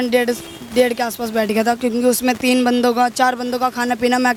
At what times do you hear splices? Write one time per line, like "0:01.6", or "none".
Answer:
none